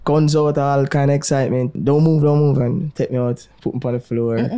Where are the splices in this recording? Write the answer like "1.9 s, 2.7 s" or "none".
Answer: 1.8 s

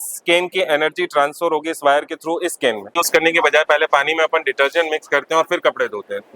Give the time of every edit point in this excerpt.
2.8 s

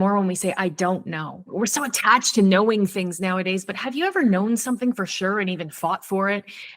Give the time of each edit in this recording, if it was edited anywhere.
1.4 s

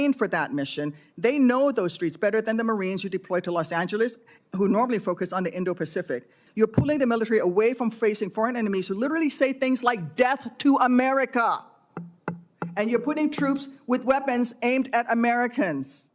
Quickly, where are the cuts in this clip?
6.4 s

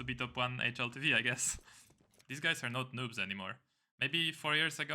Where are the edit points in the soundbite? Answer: 2.2 s

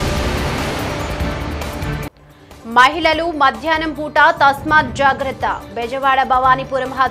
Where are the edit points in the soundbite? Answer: 2.0 s

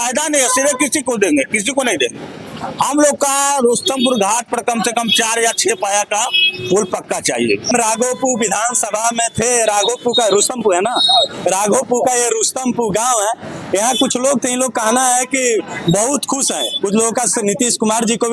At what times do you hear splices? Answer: none

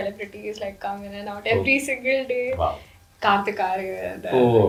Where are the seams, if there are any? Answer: none

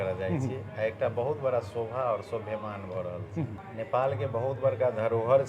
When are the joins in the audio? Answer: 3.6 s

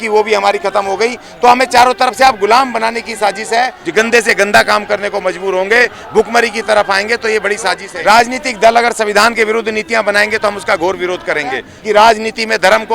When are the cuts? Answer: 3.8 s, 7.9 s, 11.7 s

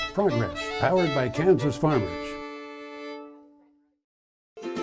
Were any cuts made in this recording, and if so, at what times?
2.1 s, 3.8 s

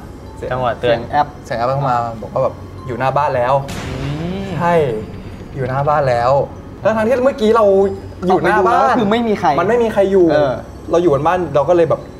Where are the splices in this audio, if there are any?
10.7 s

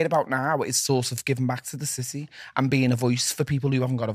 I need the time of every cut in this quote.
none

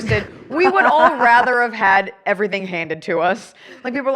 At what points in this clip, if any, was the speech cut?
none

